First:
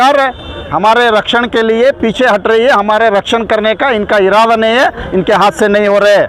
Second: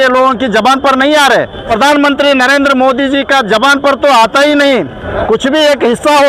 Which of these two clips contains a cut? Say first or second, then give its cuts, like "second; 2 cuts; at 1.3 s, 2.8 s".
second; 2 cuts; at 1.7 s, 5.0 s